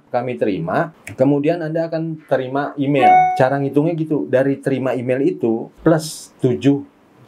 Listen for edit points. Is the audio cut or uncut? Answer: uncut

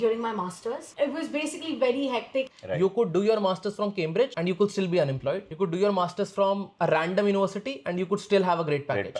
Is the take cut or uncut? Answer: cut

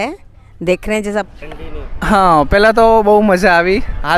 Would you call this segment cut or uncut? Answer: cut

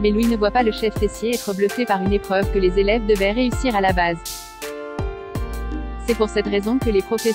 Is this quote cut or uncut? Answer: uncut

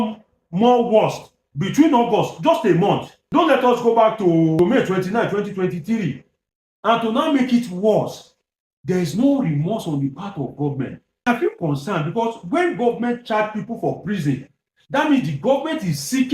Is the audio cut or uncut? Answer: cut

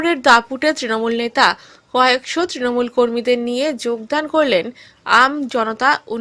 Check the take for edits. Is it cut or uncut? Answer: uncut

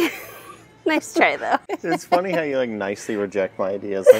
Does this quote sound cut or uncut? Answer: cut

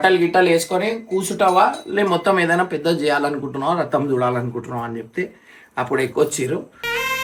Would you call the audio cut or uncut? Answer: uncut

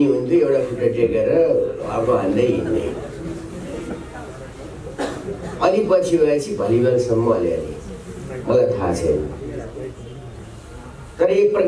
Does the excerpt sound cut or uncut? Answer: uncut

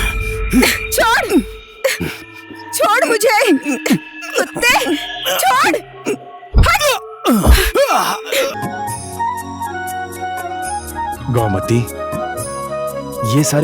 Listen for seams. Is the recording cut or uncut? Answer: cut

